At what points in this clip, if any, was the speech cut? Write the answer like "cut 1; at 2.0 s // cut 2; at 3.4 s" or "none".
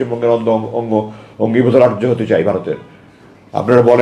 none